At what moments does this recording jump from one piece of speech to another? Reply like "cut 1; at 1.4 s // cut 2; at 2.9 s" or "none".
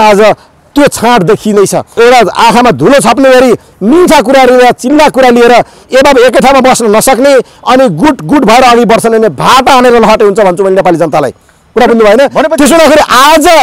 cut 1; at 1.9 s